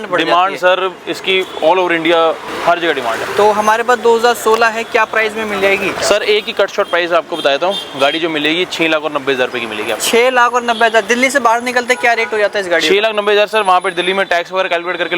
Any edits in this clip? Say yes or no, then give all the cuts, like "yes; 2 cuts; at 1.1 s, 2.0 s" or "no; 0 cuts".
no; 0 cuts